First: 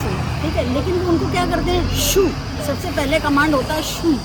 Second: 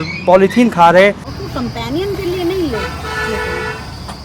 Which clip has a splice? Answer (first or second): second